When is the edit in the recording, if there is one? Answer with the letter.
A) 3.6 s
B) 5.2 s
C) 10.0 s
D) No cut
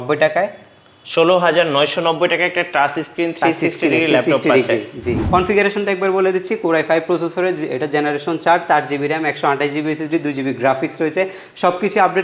B